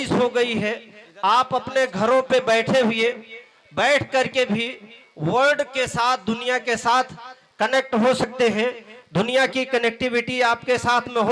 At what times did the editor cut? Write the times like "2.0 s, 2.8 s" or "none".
none